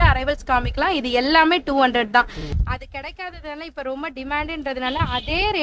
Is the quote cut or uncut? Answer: cut